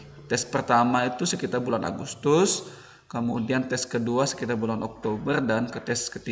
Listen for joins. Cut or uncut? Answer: uncut